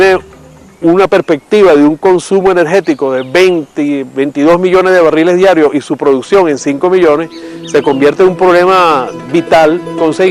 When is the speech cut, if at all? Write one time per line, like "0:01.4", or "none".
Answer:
none